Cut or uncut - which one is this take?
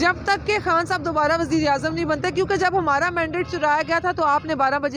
uncut